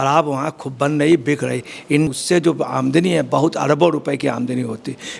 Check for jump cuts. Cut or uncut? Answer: cut